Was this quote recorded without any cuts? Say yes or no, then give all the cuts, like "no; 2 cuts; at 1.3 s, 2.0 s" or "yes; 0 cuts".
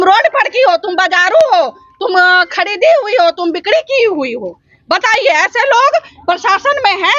yes; 0 cuts